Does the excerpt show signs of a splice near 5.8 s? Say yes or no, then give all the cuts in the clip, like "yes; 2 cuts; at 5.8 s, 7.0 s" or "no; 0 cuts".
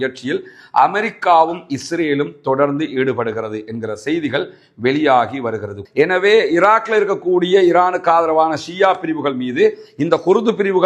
yes; 1 cut; at 5.8 s